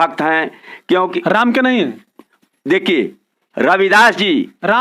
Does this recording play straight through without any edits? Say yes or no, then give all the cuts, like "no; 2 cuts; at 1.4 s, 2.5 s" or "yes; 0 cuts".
yes; 0 cuts